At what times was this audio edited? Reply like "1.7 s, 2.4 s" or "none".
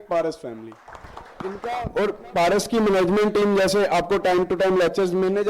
1.4 s